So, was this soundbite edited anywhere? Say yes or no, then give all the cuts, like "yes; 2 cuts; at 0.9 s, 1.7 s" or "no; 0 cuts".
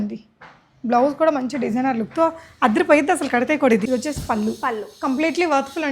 yes; 1 cut; at 3.9 s